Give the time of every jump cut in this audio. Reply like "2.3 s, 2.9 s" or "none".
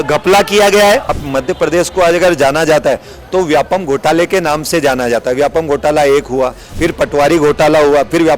1.2 s, 6.7 s